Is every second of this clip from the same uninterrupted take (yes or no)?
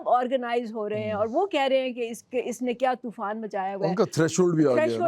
yes